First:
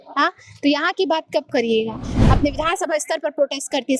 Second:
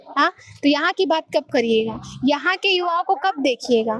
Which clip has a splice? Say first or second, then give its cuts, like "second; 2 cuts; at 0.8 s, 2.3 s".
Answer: first; 1 cut; at 2.1 s